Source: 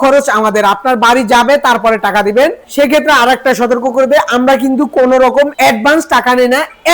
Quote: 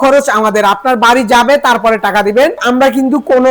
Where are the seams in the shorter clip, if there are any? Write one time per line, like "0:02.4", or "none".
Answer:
0:02.6